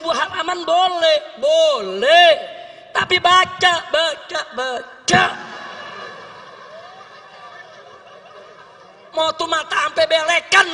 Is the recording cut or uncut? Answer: uncut